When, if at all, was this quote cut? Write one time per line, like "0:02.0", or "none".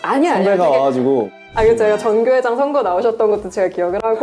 0:01.4